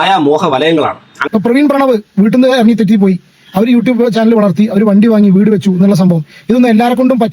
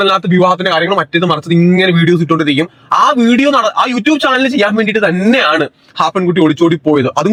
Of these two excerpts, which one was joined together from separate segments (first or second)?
first